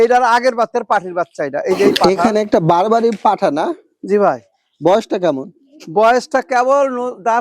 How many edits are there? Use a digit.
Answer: 1